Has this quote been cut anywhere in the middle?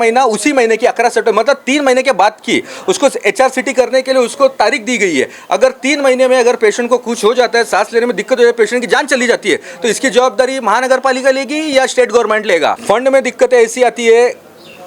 yes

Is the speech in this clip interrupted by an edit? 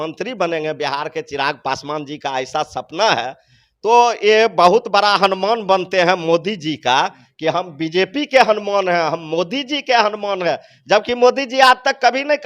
no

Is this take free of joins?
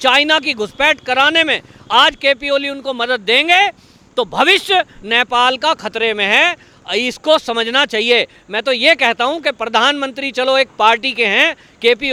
yes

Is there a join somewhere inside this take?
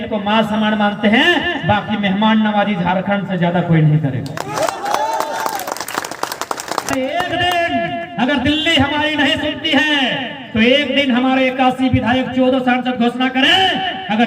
yes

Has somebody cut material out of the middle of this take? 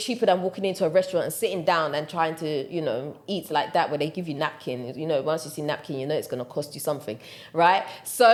no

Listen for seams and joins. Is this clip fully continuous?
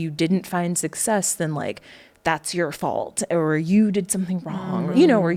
yes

